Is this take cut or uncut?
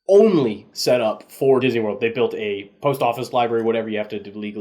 cut